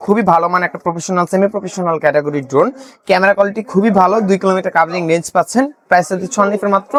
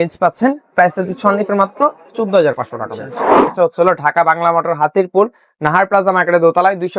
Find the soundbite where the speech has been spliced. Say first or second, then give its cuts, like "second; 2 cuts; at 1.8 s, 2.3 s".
second; 1 cut; at 3.4 s